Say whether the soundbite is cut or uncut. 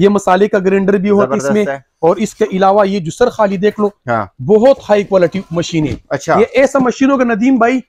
uncut